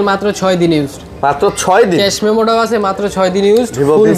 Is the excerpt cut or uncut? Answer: uncut